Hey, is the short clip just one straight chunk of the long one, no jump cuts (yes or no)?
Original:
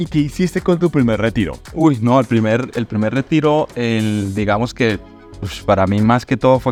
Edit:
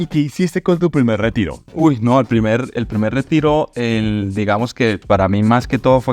no